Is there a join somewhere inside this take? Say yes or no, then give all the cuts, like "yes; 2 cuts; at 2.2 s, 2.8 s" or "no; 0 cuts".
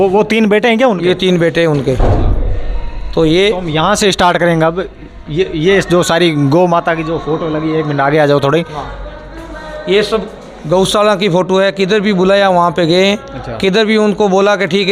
no; 0 cuts